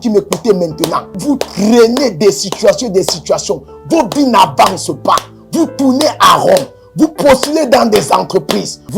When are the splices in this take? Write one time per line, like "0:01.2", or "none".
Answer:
0:01.1